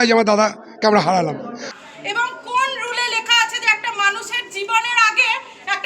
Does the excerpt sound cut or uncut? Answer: cut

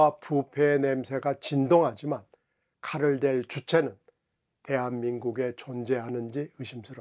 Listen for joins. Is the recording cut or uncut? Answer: uncut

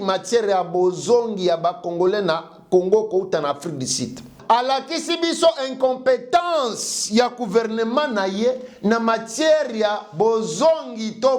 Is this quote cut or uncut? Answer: cut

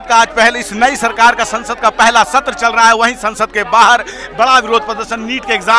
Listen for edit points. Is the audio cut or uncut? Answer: uncut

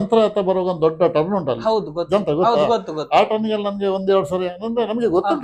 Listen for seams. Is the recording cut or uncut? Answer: uncut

